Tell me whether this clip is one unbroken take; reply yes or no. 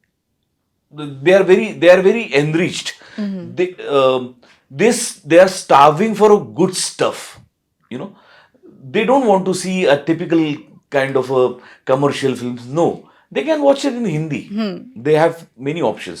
yes